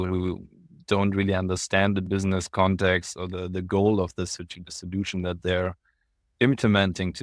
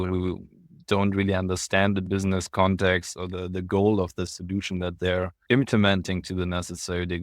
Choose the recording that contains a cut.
second; 2 cuts; at 4.4 s, 5.4 s

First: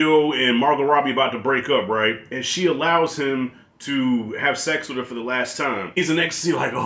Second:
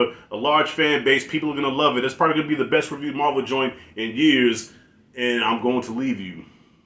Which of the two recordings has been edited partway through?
first; 1 cut; at 6.0 s

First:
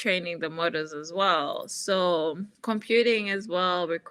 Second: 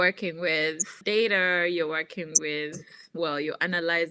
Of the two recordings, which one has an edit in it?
second; 2 cuts; at 0.9 s, 3.0 s

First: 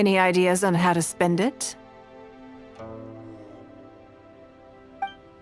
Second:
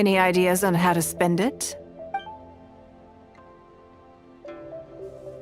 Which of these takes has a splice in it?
second; 1 cut; at 1.9 s

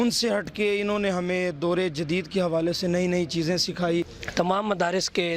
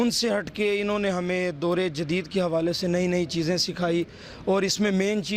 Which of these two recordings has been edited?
first; 1 cut; at 4.2 s

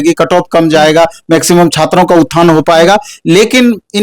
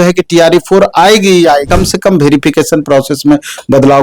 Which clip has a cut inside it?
second; 1 cut; at 1.7 s

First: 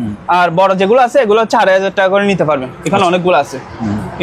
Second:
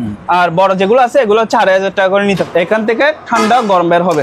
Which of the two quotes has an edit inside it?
second; 1 cut; at 2.4 s

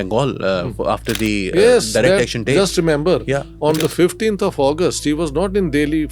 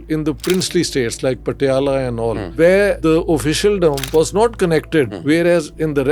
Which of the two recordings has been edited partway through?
second; 4 cuts; at 2.4 s, 3.0 s, 4.0 s, 5.1 s

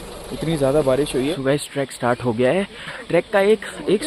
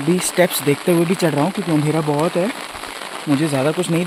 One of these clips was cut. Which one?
first; 2 cuts; at 1.3 s, 3.0 s

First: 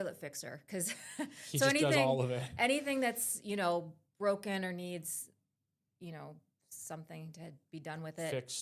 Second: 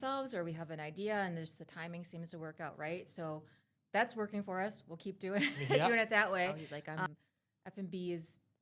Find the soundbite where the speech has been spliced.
second; 1 cut; at 7.1 s

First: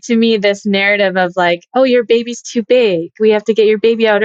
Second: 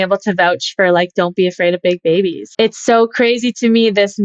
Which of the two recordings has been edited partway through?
second; 1 cut; at 2.4 s

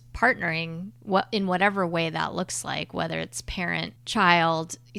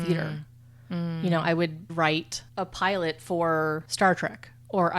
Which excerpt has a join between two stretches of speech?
second; 2 cuts; at 1.9 s, 3.9 s

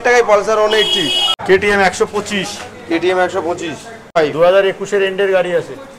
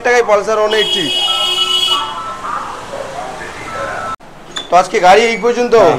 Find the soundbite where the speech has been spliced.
first; 2 cuts; at 1.3 s, 4.2 s

